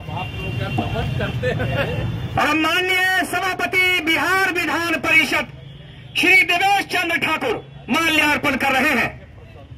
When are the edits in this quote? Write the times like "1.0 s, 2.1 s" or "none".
none